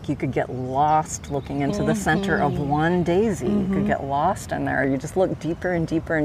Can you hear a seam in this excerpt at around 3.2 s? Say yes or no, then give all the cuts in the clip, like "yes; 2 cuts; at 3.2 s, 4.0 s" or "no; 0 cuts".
no; 1 cut; at 4.9 s